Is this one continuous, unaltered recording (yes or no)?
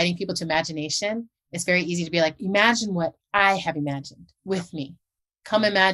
yes